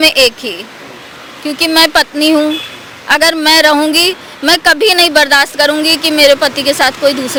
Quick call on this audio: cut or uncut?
uncut